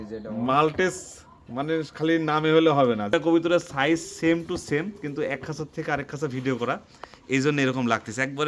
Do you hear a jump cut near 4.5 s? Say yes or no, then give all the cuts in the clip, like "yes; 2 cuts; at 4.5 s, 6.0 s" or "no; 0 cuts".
no; 1 cut; at 3.1 s